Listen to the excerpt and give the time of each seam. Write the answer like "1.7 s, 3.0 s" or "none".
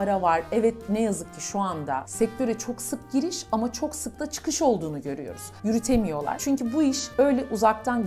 6.4 s